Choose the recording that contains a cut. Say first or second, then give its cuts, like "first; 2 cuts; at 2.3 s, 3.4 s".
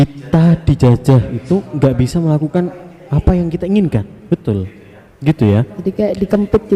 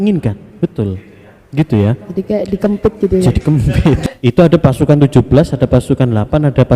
second; 1 cut; at 4.0 s